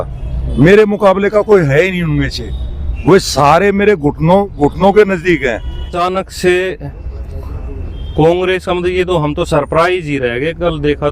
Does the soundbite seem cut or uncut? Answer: cut